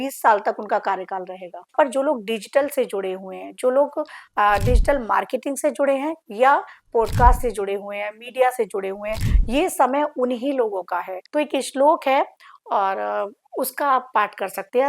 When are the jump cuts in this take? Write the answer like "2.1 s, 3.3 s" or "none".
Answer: 1.7 s, 11.2 s

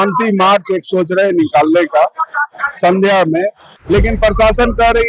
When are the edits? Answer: 3.7 s

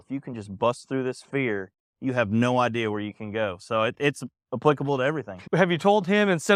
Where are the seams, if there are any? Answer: none

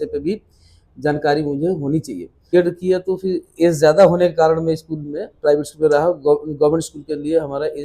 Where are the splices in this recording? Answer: 2.5 s

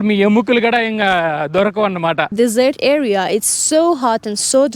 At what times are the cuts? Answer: 2.3 s

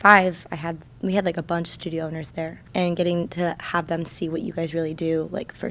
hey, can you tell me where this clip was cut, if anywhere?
2.6 s

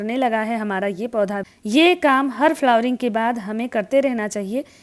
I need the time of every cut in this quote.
1.4 s

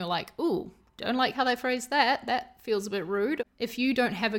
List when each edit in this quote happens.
3.4 s

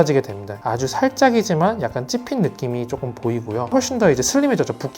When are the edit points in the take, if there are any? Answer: 3.7 s

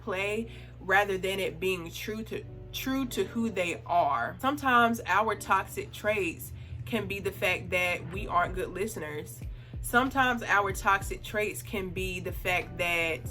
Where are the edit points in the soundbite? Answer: 4.3 s

